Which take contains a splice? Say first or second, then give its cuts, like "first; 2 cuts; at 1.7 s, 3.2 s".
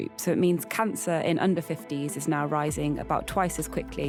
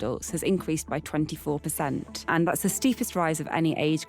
second; 1 cut; at 2.1 s